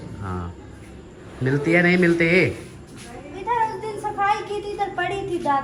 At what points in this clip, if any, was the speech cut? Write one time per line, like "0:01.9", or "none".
none